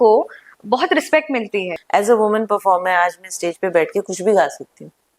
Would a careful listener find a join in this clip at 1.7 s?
yes; 1 cut; at 1.7 s

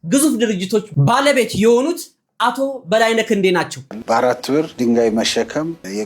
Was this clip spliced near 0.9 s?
no; 1 cut; at 3.8 s

